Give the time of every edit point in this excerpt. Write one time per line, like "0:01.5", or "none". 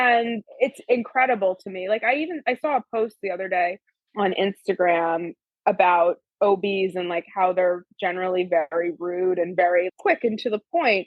none